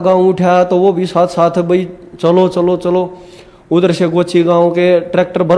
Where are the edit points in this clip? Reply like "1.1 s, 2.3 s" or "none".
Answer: none